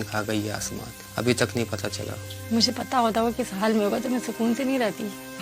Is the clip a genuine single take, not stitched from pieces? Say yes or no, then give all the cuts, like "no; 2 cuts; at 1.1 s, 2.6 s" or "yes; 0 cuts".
no; 1 cut; at 2.1 s